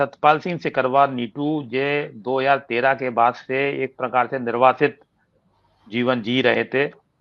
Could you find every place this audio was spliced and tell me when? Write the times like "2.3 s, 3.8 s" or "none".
none

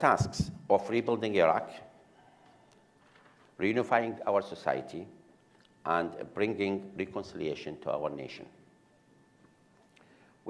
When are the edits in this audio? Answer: 7.6 s

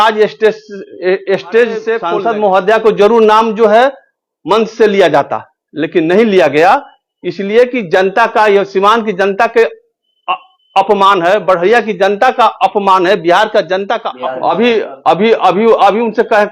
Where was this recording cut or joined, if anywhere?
2.0 s, 14.1 s

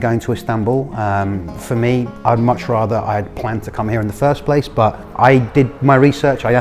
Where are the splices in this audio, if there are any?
none

